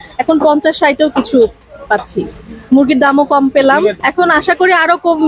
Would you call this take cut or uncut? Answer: cut